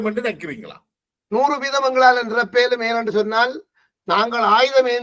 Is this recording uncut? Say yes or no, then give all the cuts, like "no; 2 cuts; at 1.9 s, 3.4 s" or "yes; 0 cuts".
yes; 0 cuts